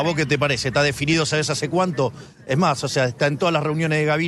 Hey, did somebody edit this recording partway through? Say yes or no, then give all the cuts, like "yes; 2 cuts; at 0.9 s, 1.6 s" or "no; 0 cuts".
no; 0 cuts